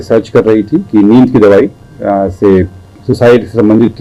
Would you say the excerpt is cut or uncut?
uncut